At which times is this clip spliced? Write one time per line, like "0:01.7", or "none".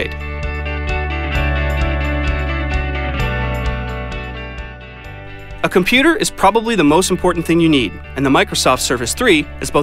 none